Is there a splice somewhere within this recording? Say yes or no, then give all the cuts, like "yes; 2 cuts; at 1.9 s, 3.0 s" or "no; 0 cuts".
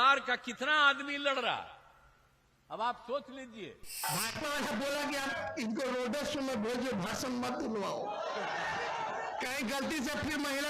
yes; 1 cut; at 4.0 s